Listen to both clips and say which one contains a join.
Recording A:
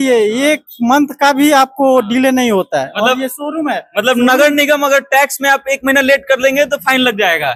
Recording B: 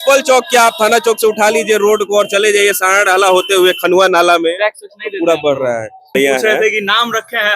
B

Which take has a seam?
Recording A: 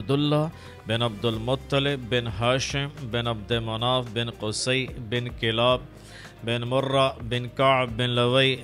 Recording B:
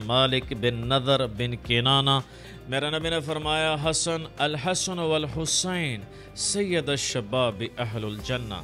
B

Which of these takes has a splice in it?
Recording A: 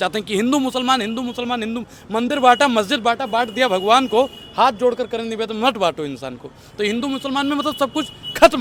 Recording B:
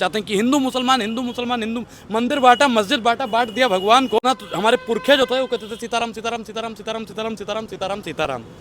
B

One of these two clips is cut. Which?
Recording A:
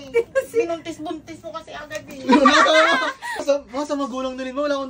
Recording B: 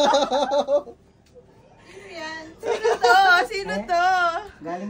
A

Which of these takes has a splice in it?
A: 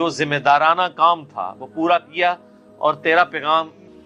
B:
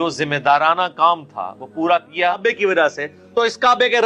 B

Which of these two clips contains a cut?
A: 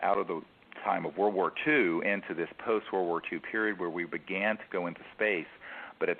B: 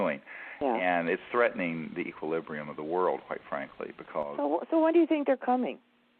A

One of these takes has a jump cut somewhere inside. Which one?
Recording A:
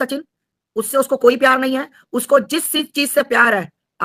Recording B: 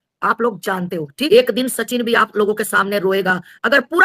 B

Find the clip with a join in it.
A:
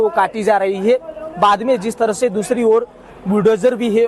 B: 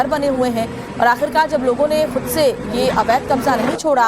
A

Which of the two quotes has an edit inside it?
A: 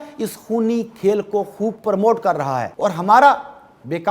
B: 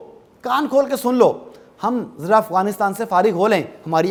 A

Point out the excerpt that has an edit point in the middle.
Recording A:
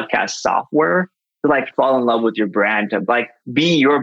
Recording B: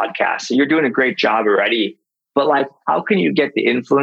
A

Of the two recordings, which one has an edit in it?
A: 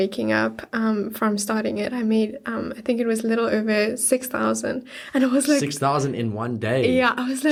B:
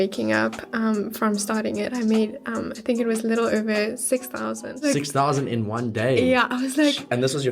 B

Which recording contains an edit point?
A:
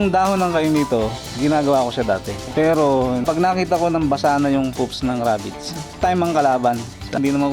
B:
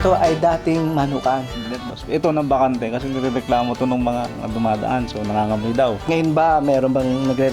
B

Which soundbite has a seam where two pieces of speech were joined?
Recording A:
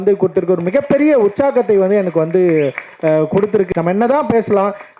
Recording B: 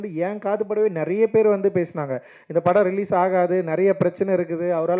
A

